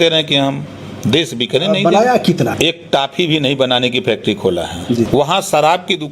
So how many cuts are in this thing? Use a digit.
2